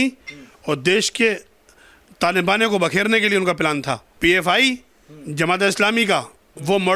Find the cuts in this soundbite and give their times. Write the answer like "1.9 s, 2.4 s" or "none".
4.1 s